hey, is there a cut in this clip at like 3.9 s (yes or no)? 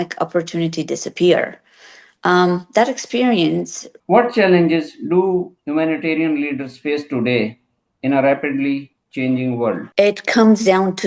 yes